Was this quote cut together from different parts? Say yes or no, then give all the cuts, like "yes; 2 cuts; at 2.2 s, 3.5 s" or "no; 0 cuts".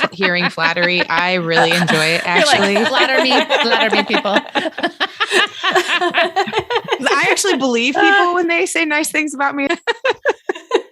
yes; 1 cut; at 9.7 s